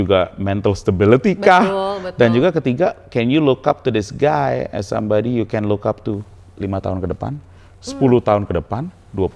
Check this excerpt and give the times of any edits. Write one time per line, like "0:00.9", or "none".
none